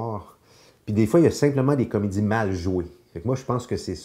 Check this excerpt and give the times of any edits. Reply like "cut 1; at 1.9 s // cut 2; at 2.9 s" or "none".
none